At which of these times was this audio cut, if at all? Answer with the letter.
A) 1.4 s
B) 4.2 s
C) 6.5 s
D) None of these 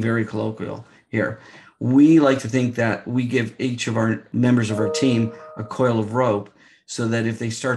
B